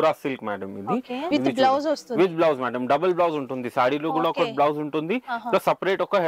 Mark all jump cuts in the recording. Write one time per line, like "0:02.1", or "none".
0:01.3